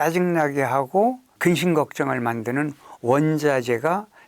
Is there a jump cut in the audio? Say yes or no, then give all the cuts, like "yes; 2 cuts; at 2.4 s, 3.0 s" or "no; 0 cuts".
yes; 1 cut; at 1.3 s